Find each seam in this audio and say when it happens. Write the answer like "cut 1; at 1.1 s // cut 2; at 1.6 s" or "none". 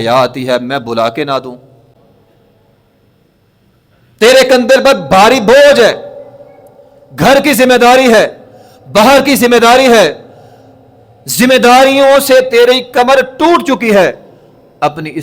cut 1; at 1.9 s